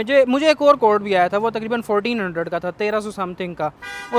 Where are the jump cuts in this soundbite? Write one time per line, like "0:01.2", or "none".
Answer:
none